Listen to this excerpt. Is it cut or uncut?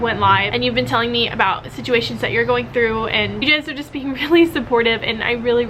cut